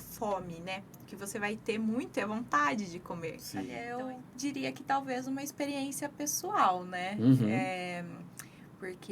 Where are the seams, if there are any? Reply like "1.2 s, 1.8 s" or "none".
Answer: 3.8 s